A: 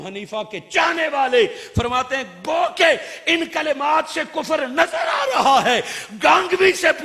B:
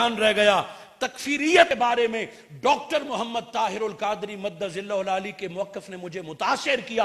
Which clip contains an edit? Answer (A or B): B